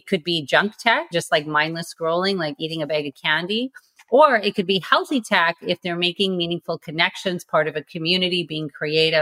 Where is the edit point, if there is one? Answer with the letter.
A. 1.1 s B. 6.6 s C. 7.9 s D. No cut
A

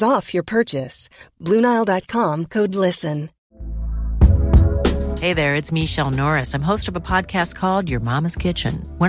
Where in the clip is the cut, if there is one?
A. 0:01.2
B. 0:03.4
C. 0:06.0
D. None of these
B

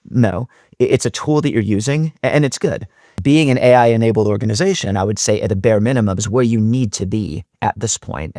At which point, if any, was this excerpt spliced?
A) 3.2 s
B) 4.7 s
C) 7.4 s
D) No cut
A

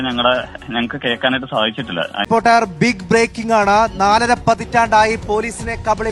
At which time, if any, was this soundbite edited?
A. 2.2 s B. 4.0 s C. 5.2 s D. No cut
A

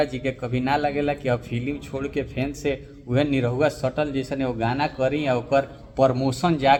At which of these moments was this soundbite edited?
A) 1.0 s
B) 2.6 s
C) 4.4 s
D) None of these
D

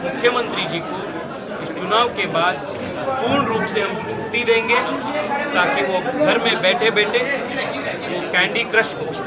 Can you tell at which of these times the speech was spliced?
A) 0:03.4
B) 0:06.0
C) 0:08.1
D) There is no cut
D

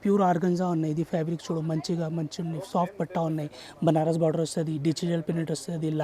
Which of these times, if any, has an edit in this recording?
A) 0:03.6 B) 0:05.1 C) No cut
C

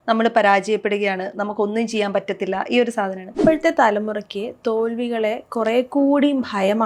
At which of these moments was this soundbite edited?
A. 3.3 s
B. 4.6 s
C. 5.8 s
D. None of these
A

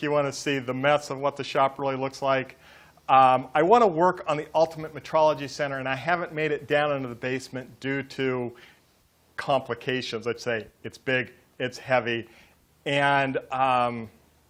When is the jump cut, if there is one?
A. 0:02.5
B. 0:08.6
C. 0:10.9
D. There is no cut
B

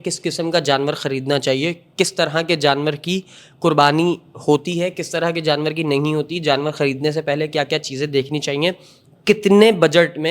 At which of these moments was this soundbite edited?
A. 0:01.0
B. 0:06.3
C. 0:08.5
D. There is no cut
D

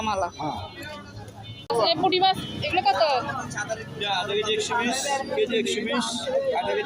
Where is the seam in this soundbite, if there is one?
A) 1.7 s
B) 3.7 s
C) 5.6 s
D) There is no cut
A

